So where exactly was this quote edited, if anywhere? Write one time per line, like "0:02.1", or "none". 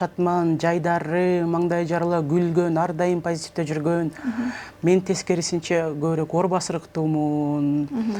none

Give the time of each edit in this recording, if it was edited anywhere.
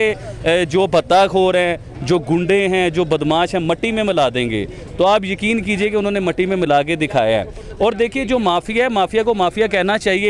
none

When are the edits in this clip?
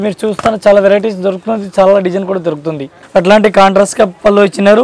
0:02.9

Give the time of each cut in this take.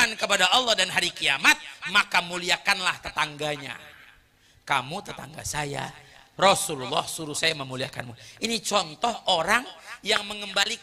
none

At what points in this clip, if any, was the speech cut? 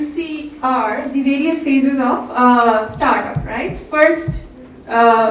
none

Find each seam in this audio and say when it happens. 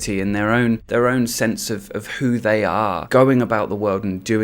0:00.8
0:03.0

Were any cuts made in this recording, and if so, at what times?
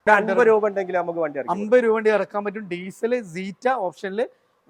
none

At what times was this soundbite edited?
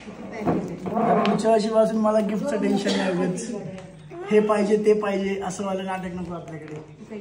none

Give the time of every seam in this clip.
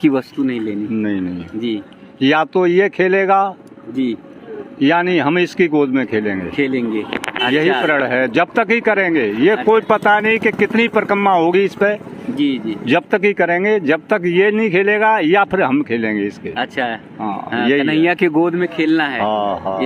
none

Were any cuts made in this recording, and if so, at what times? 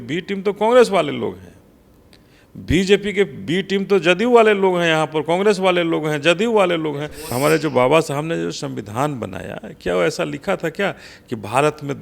0:07.3

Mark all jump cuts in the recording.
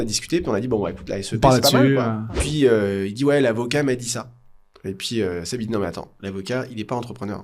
0:02.3

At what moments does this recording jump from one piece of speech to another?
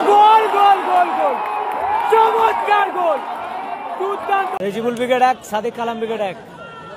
0:04.6

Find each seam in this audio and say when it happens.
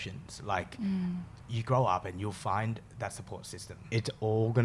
0:03.8

